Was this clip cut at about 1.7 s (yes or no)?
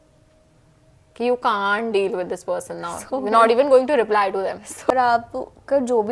no